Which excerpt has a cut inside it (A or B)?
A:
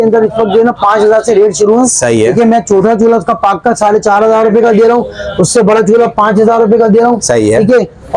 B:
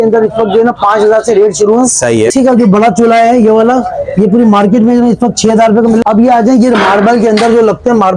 B